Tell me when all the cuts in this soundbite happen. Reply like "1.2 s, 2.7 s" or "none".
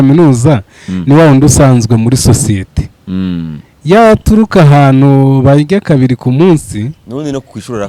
none